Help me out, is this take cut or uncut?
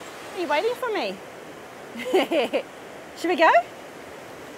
uncut